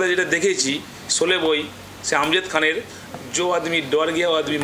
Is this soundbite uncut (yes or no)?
yes